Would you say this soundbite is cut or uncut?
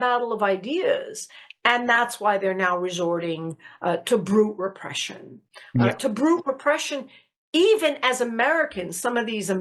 uncut